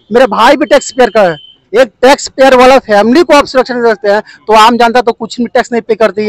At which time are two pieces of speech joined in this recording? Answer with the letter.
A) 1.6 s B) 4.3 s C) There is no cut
A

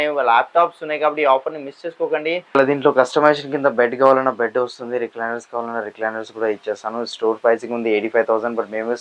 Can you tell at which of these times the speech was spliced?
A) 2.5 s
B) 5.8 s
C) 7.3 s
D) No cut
A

